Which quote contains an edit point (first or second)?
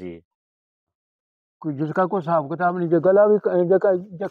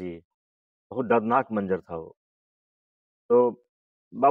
first